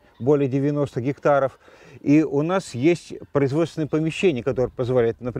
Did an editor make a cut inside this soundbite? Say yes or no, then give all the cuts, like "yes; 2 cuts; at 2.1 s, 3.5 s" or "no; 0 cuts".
no; 0 cuts